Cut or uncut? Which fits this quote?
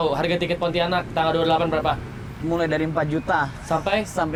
uncut